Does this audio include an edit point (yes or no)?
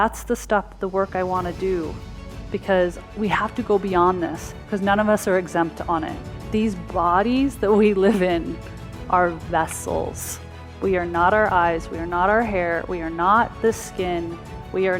no